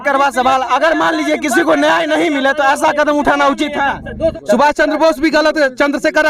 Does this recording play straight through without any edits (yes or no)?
no